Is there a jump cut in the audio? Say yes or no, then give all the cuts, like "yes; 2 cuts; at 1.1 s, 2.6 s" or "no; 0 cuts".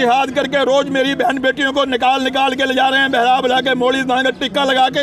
no; 0 cuts